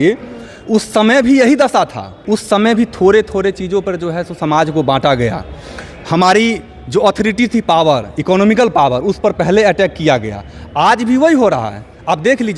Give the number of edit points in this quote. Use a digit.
1